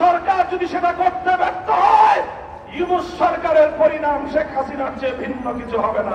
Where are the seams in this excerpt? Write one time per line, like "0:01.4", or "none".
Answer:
none